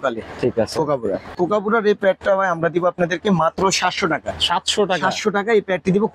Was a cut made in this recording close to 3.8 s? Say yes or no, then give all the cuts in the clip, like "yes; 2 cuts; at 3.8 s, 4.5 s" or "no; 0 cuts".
no; 1 cut; at 1.3 s